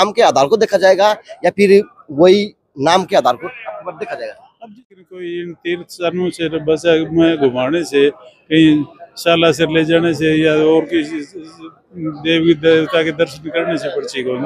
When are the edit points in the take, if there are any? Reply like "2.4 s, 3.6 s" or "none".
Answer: 4.7 s